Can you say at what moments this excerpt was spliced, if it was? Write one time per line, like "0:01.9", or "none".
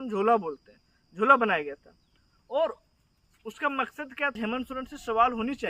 0:04.4